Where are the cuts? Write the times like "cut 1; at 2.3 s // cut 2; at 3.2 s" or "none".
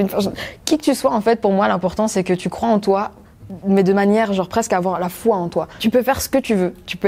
cut 1; at 5.7 s